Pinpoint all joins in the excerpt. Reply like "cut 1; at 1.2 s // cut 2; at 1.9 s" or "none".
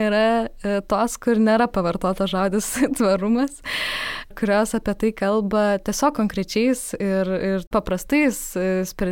cut 1; at 4.3 s // cut 2; at 7.7 s

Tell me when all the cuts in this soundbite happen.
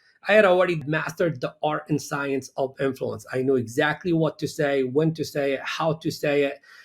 cut 1; at 0.9 s

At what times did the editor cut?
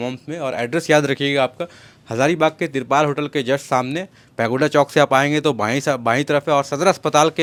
none

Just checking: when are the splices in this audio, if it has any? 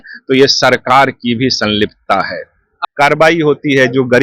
cut 1; at 2.8 s

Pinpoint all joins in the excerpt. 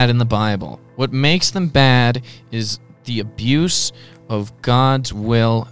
none

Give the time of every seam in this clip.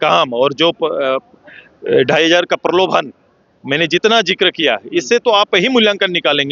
none

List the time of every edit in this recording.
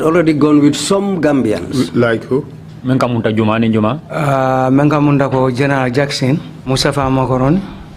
cut 1; at 6.5 s

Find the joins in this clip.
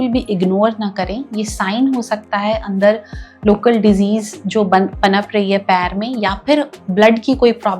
none

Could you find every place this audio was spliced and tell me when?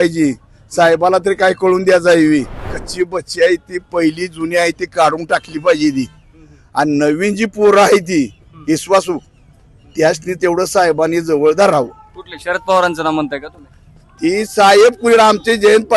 cut 1; at 2.8 s

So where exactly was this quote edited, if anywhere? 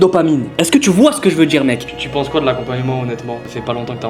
cut 1; at 1.9 s

